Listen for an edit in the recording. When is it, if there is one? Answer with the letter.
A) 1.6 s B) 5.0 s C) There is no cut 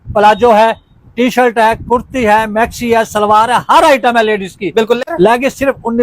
B